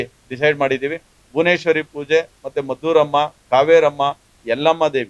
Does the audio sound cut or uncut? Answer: uncut